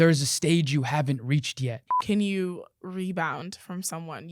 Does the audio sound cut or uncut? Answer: cut